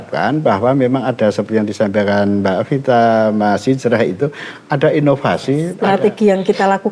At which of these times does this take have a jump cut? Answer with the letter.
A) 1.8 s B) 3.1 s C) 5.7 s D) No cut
C